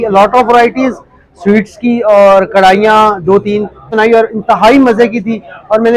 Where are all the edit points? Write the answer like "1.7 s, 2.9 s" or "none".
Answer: 3.9 s